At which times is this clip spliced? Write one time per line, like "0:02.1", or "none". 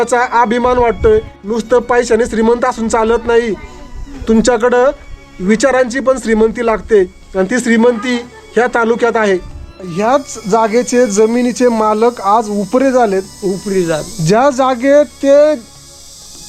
0:01.4
0:09.6